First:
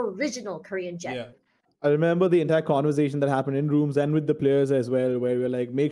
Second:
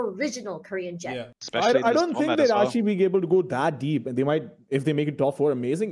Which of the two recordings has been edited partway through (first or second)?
first